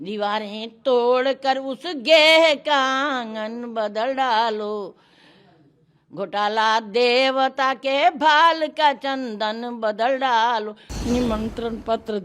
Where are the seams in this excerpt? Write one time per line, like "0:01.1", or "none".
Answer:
0:10.8